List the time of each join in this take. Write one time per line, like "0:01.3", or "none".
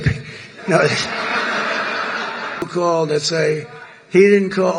0:02.7